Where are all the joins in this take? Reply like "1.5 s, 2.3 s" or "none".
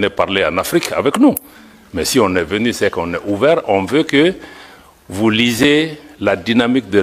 none